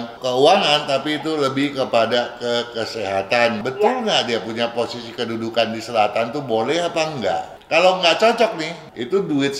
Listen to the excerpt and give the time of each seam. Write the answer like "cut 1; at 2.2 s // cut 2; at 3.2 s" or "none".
cut 1; at 3.6 s // cut 2; at 7.5 s // cut 3; at 8.7 s